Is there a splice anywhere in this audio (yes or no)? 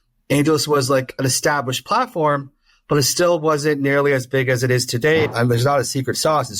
yes